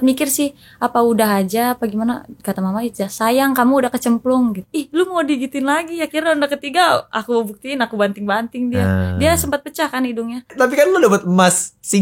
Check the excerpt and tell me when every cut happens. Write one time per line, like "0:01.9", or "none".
0:04.7
0:10.5